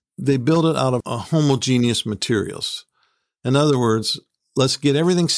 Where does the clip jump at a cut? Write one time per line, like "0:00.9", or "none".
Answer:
none